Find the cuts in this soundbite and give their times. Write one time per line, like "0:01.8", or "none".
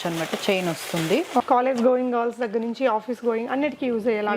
0:01.4